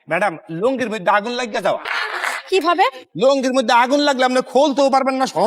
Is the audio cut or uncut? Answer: cut